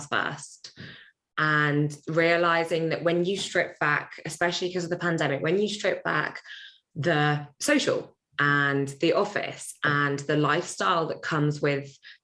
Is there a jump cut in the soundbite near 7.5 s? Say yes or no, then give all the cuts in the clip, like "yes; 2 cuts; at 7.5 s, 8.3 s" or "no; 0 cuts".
yes; 1 cut; at 7.5 s